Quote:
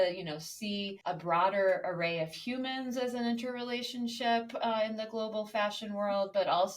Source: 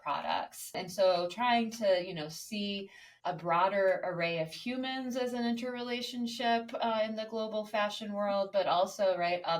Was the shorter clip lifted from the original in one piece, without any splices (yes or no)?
no